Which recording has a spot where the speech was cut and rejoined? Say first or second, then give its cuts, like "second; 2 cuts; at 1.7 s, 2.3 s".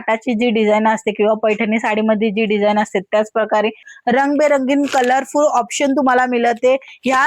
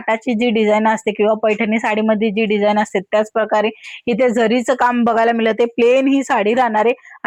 first; 1 cut; at 3.9 s